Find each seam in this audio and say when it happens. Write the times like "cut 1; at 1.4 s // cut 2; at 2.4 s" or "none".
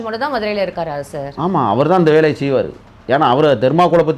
none